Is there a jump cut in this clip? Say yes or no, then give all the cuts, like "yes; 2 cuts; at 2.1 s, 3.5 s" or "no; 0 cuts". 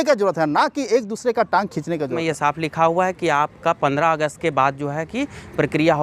yes; 1 cut; at 2.1 s